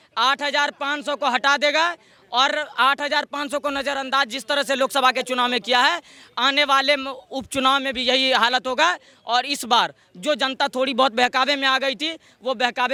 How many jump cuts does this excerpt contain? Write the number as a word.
zero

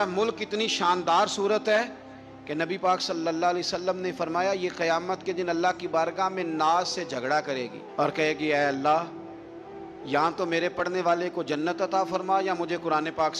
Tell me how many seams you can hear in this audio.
zero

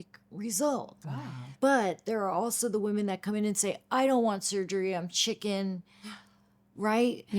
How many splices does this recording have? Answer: one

